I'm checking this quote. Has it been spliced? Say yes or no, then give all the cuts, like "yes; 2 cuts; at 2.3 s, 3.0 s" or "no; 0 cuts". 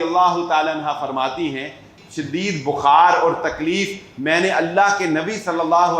yes; 1 cut; at 1.9 s